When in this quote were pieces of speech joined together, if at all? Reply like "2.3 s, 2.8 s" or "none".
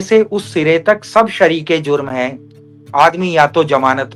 none